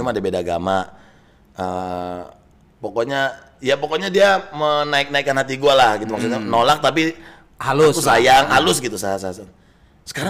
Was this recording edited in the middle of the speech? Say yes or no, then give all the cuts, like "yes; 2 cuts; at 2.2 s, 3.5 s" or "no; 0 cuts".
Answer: no; 0 cuts